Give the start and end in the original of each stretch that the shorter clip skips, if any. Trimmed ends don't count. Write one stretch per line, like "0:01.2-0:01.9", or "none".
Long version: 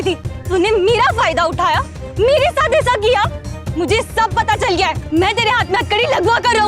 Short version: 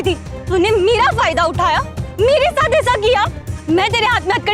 0:03.6-0:05.0